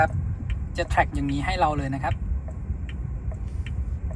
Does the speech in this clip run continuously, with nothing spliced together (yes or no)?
yes